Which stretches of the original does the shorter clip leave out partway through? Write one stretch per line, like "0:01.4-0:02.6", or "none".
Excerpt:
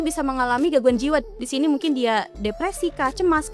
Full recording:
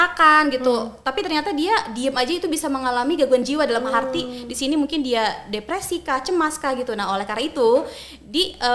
0:03.7-0:04.3